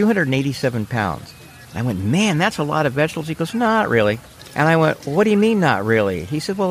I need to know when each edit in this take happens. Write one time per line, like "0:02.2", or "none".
0:04.4